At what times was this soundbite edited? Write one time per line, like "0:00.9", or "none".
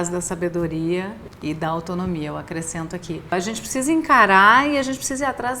0:01.2
0:03.3